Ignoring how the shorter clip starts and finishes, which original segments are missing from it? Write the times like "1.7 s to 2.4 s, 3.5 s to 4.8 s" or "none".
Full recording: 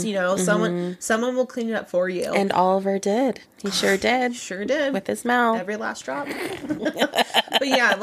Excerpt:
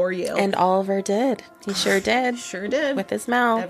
none